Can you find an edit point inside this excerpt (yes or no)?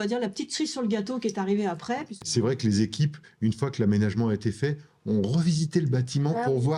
yes